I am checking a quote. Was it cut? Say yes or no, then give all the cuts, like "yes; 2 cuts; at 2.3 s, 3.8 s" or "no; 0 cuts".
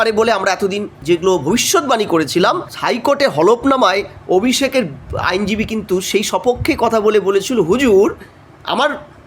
yes; 2 cuts; at 0.9 s, 2.7 s